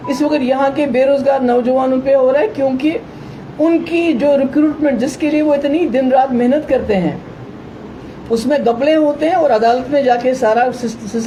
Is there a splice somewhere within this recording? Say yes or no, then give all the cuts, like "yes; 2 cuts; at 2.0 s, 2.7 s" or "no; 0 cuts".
no; 0 cuts